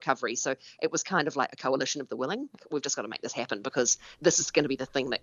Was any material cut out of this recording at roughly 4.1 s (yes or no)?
no